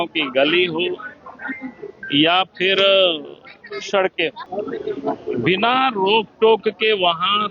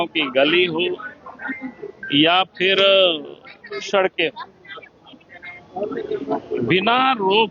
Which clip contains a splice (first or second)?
first